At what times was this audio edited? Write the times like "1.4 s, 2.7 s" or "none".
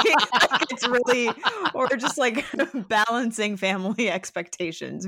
none